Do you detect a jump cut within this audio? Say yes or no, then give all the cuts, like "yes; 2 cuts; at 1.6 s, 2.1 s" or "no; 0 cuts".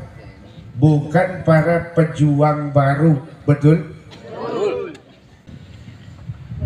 yes; 1 cut; at 5.4 s